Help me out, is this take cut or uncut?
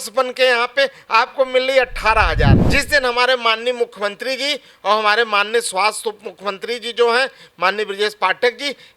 cut